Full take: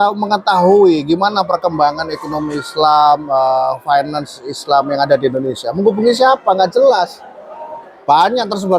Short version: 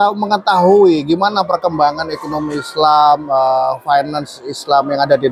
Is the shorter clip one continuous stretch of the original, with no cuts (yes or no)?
yes